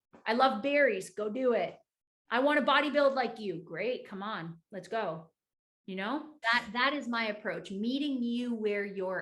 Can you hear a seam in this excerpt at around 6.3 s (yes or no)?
yes